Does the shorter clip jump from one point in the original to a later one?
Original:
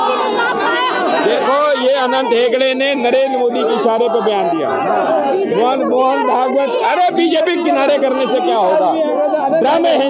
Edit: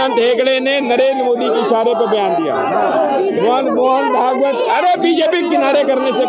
no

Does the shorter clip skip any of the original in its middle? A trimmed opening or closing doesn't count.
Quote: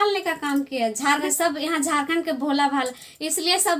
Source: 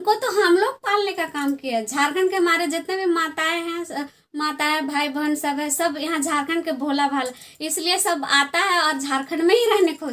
yes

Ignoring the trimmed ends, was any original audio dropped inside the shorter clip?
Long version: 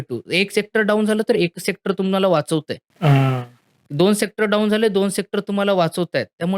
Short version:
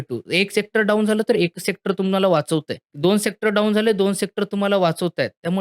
yes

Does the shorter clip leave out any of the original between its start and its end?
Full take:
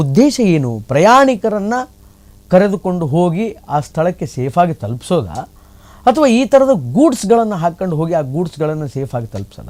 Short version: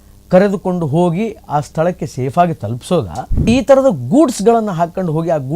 yes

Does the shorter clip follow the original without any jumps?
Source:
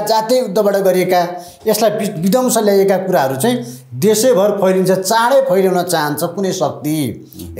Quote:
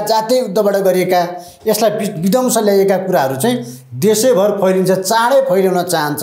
yes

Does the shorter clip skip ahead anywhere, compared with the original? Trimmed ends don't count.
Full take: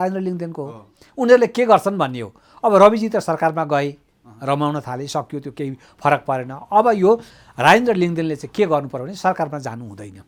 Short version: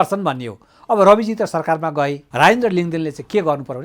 yes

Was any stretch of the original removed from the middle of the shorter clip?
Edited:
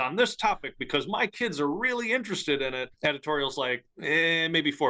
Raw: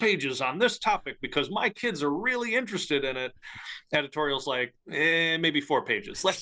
yes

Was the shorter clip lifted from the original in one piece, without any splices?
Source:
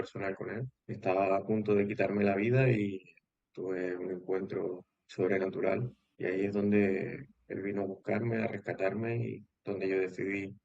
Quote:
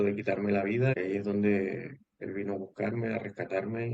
no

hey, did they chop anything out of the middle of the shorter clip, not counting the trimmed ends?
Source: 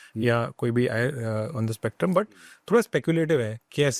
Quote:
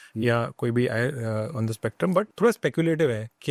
yes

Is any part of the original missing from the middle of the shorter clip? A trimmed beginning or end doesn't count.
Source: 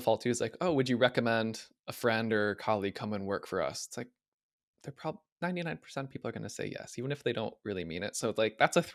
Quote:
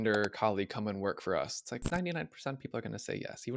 yes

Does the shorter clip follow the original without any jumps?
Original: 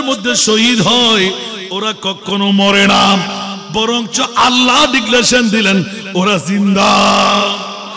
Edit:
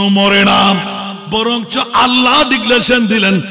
yes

